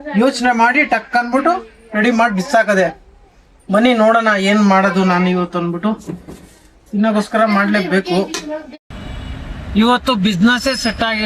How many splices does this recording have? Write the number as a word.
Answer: one